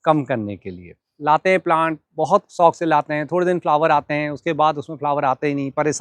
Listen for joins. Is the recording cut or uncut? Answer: cut